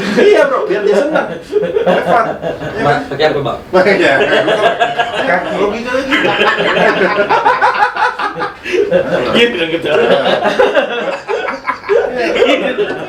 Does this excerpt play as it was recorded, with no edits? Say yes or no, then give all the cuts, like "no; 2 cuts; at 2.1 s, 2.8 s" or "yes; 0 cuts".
yes; 0 cuts